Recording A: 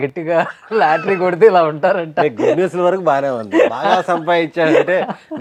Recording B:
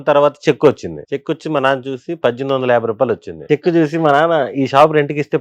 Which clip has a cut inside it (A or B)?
B